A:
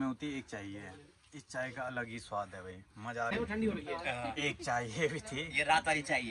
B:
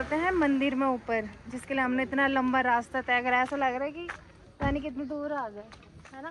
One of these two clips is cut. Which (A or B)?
A